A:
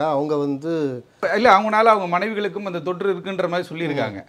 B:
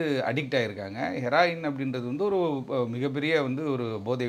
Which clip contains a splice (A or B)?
A